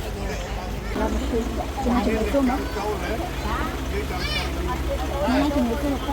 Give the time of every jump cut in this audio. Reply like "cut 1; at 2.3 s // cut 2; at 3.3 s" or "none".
cut 1; at 1.0 s